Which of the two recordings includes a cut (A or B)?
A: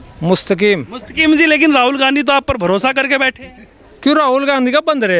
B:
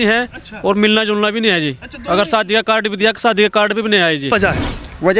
B